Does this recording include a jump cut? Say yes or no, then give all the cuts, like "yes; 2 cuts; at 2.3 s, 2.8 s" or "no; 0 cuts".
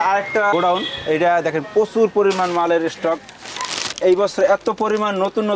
no; 0 cuts